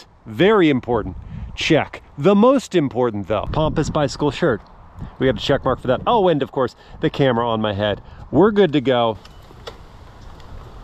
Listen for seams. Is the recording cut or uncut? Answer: cut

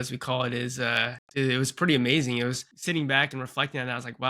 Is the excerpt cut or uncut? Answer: cut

